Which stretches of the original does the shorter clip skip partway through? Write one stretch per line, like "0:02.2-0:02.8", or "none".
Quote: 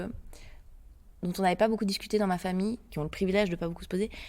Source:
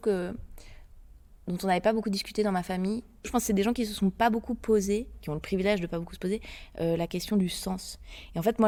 0:03.1-0:05.2

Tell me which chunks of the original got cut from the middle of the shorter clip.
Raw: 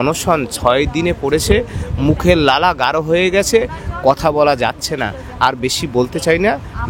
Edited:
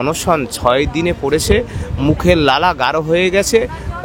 none

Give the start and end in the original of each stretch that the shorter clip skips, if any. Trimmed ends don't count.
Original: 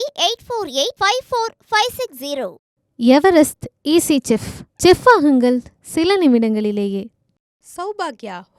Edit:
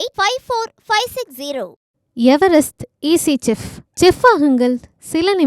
none

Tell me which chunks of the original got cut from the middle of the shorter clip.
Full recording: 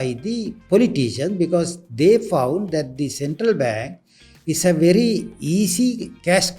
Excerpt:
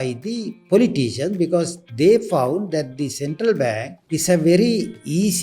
0:03.9-0:04.3

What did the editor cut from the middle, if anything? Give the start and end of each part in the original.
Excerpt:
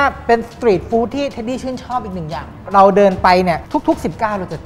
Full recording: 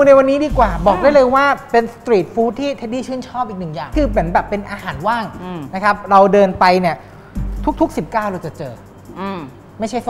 0:04.0-0:05.9
0:07.0-0:07.6

